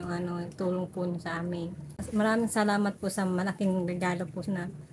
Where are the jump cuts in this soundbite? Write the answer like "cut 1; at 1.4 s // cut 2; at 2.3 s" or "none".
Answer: cut 1; at 2.0 s